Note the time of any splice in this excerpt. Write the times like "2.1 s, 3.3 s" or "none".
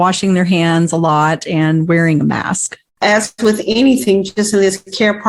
3.0 s